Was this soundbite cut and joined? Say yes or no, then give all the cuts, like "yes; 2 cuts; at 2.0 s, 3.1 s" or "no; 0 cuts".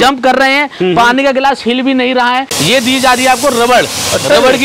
yes; 1 cut; at 2.5 s